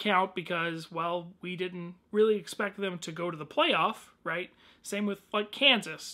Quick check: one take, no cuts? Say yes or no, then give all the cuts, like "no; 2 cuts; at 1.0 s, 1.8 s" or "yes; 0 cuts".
yes; 0 cuts